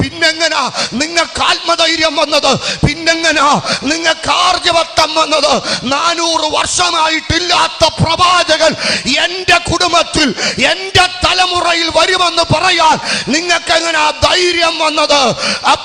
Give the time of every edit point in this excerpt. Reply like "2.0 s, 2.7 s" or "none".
none

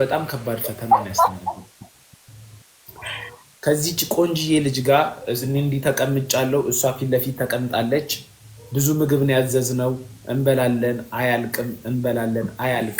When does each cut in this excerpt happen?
1.0 s

